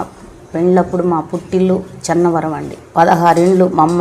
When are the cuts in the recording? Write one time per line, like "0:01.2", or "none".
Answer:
0:02.7